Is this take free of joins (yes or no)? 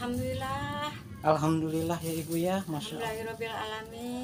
yes